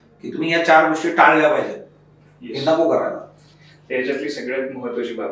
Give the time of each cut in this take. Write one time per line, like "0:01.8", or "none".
none